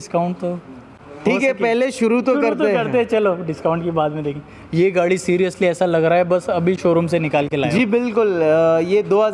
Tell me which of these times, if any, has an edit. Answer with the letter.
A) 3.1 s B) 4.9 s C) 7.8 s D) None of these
D